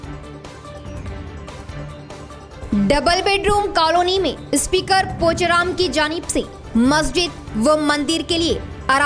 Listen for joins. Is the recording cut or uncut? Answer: cut